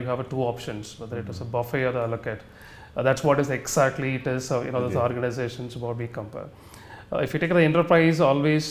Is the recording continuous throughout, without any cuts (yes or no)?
yes